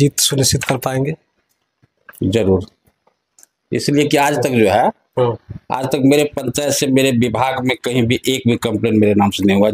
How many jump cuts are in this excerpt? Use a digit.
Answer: 0